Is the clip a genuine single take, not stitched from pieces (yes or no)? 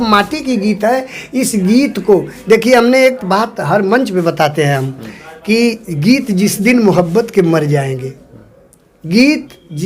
yes